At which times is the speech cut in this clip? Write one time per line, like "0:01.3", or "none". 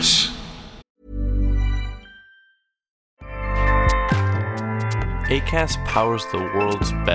0:00.9